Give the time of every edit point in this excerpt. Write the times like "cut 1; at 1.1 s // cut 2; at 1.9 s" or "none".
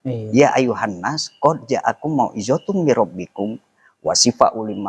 none